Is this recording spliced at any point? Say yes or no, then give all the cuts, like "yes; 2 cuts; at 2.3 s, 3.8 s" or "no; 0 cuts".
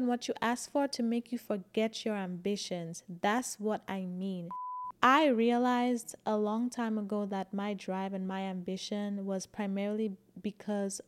yes; 1 cut; at 4.5 s